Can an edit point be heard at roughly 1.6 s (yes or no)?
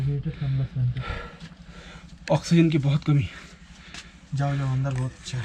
no